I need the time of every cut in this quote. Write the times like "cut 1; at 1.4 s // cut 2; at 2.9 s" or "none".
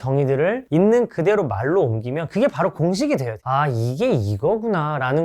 cut 1; at 3.4 s